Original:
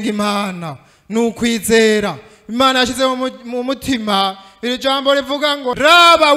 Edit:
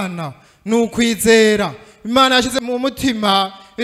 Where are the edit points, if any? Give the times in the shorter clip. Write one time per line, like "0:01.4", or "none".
0:02.5